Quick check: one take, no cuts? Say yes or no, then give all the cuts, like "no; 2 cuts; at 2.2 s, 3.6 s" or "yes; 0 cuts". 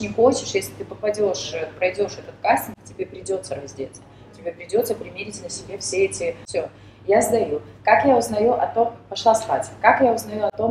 no; 1 cut; at 6.4 s